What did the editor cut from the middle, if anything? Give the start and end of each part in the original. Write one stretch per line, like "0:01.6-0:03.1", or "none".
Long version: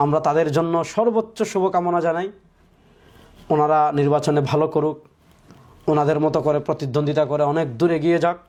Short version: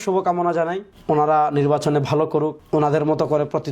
0:02.4-0:03.3
0:05.0-0:05.7